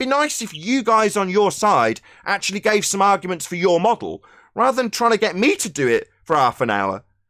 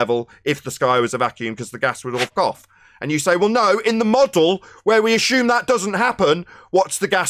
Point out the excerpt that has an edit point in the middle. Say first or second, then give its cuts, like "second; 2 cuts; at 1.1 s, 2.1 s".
second; 1 cut; at 2.3 s